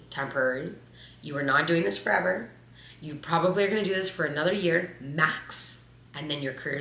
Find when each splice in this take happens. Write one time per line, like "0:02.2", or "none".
none